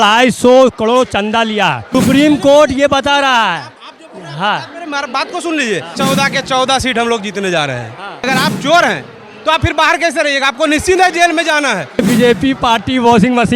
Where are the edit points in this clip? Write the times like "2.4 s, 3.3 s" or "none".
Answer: 1.8 s, 6.0 s, 8.3 s, 12.0 s